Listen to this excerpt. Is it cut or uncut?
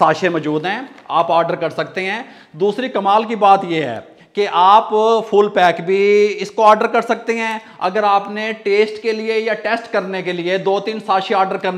uncut